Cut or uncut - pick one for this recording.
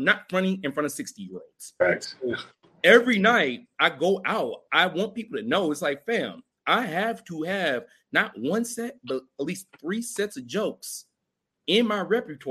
uncut